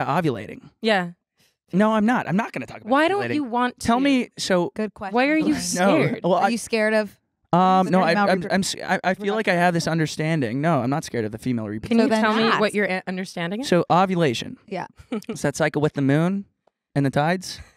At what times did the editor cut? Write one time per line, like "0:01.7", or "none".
none